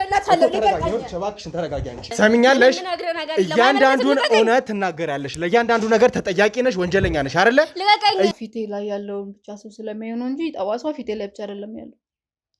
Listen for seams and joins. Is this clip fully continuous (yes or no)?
no